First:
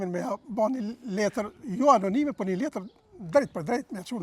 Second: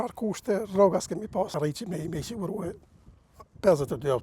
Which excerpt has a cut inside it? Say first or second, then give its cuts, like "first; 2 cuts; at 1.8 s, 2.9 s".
second; 1 cut; at 1.5 s